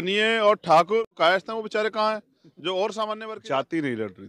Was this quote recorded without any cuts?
no; 2 cuts; at 1.1 s, 3.2 s

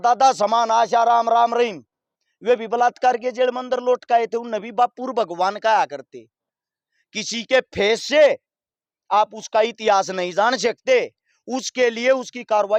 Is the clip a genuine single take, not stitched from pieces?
yes; 0 cuts

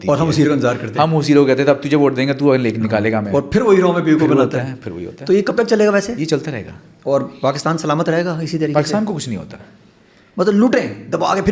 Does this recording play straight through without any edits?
yes; 0 cuts

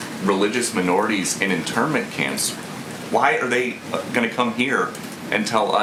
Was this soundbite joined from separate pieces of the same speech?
no; 0 cuts

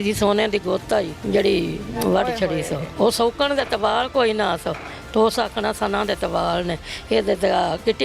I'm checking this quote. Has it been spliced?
yes; 2 cuts; at 1.2 s, 2.9 s

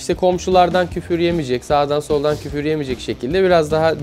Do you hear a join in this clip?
no; 0 cuts

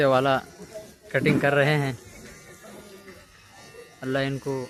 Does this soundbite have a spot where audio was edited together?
no; 0 cuts

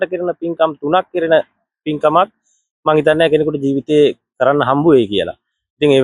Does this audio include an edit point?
no; 0 cuts

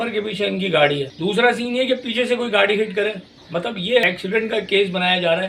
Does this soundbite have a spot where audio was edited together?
yes; 2 cuts; at 1.1 s, 3.6 s

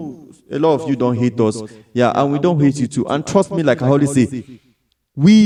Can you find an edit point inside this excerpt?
no; 0 cuts

